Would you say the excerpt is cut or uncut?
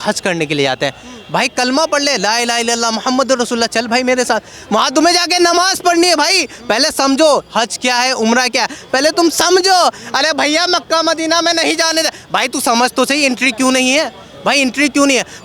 uncut